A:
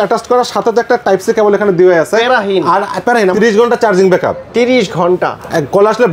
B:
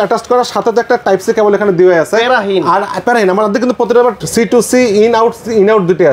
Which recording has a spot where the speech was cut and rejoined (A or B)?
A